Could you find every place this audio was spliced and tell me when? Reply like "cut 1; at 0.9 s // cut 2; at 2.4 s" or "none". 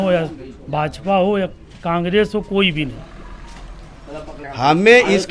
cut 1; at 4.4 s

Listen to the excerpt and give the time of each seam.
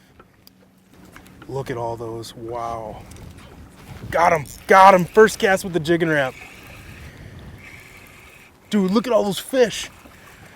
cut 1; at 0.9 s

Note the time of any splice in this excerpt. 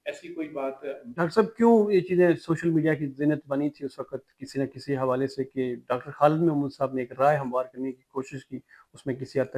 cut 1; at 1.1 s

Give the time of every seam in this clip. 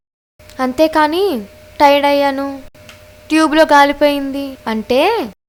none

